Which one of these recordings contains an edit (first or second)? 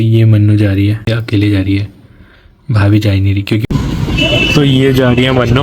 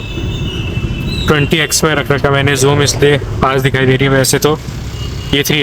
first